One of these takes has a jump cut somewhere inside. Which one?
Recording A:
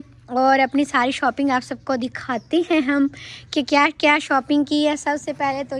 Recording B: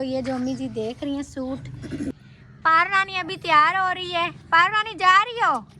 B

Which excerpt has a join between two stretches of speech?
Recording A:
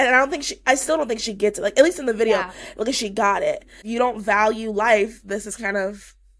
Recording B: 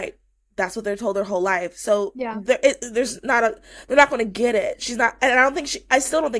A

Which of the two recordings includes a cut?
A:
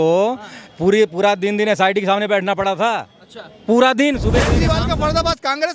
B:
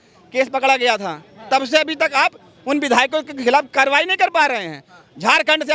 A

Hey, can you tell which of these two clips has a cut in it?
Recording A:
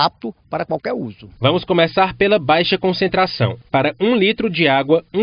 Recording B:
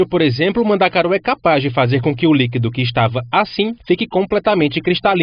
A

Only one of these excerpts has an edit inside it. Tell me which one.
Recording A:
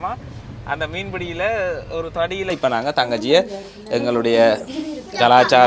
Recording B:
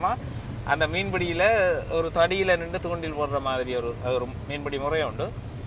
A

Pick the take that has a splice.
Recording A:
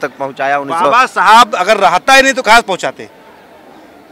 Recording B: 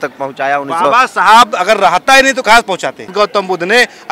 B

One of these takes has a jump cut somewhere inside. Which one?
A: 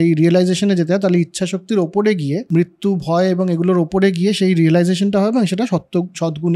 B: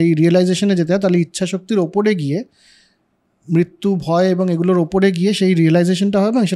A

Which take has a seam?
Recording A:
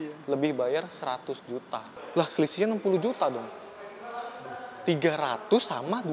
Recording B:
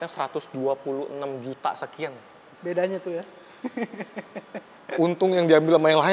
A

